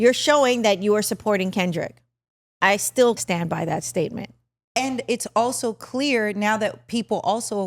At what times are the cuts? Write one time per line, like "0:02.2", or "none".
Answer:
0:03.2